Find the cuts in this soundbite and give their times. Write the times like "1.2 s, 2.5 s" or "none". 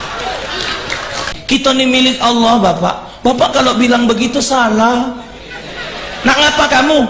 1.3 s